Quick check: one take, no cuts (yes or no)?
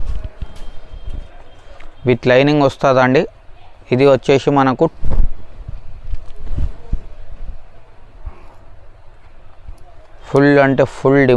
no